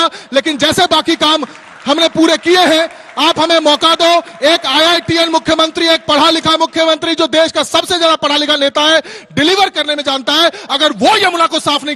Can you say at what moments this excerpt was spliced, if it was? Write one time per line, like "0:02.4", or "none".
none